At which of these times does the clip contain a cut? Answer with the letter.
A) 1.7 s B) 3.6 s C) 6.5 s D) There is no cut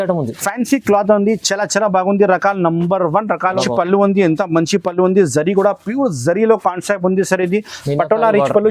B